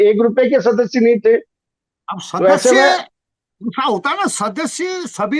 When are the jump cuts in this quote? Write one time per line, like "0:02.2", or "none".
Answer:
none